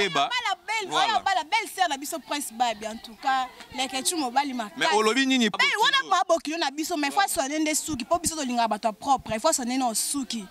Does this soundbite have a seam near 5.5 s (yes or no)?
yes